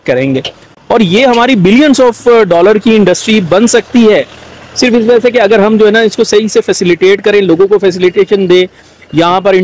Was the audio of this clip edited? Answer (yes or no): no